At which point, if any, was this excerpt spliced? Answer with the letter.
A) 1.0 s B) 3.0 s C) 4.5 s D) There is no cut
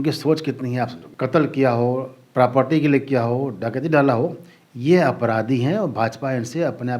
A